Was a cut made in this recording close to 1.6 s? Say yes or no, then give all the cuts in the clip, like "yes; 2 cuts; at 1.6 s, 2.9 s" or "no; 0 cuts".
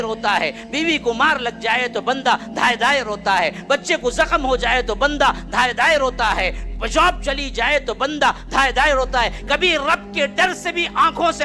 no; 0 cuts